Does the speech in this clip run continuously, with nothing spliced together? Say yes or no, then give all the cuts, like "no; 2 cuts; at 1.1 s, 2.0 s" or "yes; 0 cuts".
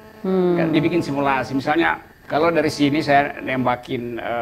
no; 1 cut; at 2.1 s